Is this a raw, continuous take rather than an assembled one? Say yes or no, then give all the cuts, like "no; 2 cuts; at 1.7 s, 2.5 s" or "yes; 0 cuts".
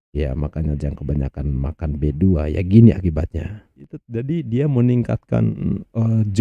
no; 1 cut; at 3.9 s